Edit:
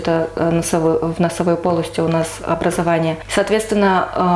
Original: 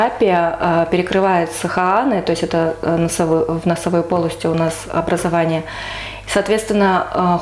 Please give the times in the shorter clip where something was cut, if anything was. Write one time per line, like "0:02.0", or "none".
0:03.2